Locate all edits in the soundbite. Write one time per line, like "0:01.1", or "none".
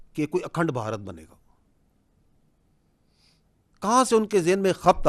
none